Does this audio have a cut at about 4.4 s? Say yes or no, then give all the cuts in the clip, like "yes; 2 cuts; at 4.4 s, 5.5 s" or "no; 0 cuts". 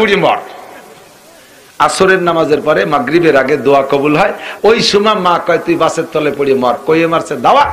yes; 1 cut; at 4.4 s